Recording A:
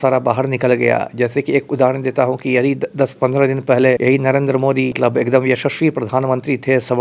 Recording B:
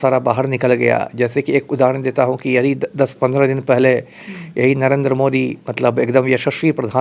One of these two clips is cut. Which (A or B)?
A